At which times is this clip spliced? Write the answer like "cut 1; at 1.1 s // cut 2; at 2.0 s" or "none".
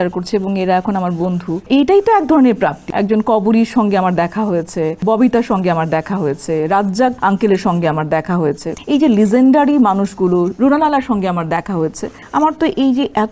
cut 1; at 1.6 s // cut 2; at 2.8 s // cut 3; at 5.0 s // cut 4; at 7.2 s // cut 5; at 8.7 s // cut 6; at 12.1 s